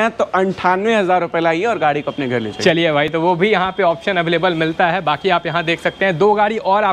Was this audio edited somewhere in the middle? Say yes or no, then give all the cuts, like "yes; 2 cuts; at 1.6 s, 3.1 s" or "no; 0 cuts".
no; 0 cuts